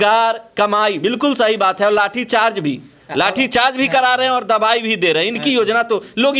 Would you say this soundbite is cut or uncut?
uncut